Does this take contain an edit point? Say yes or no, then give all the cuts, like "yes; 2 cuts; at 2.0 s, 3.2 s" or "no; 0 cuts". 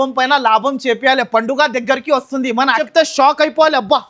yes; 1 cut; at 2.8 s